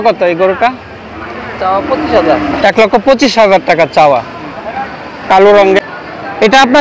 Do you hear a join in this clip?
yes; 1 cut; at 5.8 s

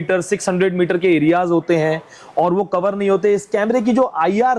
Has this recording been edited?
no; 0 cuts

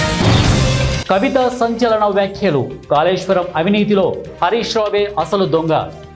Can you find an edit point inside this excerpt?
no; 0 cuts

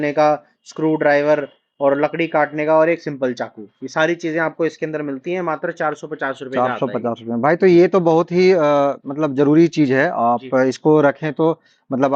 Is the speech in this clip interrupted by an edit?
no; 0 cuts

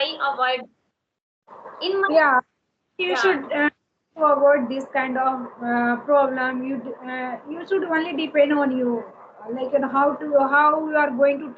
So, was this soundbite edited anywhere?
no; 0 cuts

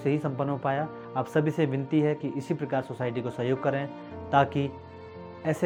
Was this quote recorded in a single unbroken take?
yes; 0 cuts

